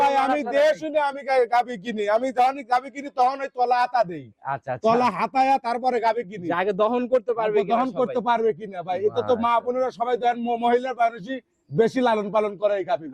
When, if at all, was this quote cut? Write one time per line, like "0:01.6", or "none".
none